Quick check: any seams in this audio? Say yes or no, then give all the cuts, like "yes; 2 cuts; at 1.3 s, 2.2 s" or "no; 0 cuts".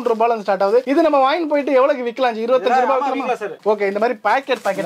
no; 0 cuts